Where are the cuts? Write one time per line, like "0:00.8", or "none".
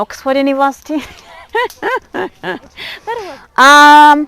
0:03.2